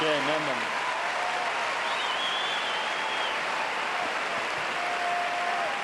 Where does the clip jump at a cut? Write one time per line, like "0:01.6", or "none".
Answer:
none